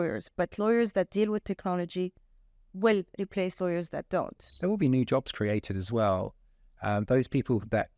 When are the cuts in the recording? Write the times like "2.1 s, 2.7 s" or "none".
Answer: 4.4 s

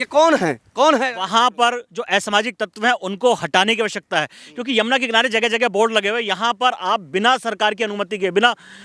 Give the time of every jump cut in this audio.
none

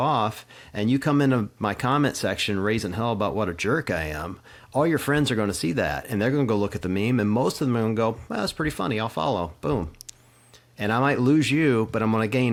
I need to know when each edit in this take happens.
none

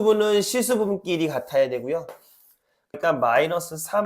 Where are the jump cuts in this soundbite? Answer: 3.0 s

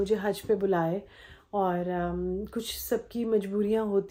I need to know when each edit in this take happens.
none

